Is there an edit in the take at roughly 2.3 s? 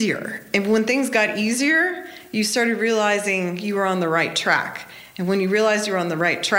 no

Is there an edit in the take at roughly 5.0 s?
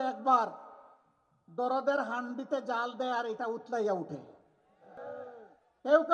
yes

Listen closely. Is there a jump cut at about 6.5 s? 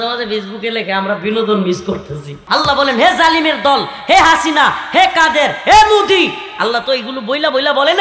no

